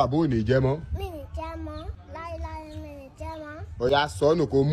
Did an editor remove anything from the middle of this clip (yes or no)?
no